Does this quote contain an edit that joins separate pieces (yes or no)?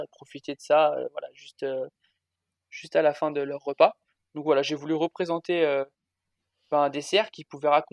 no